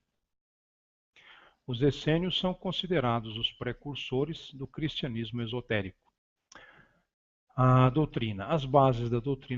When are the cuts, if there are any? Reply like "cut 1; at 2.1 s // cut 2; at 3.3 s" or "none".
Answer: cut 1; at 4.8 s